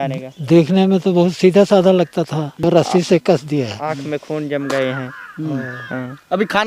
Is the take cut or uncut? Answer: cut